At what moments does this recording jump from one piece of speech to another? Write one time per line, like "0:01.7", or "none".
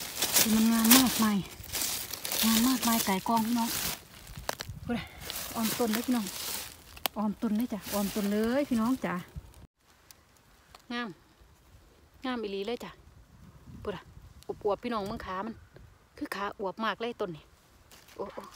0:09.7